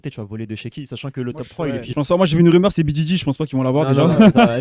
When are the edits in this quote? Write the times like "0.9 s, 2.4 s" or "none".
1.9 s